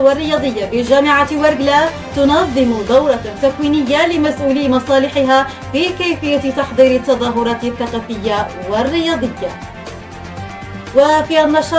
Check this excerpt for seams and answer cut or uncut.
cut